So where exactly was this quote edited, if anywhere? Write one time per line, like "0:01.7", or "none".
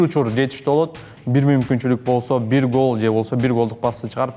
none